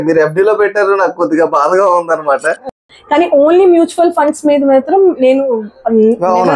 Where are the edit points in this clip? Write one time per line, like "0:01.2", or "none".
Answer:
0:02.6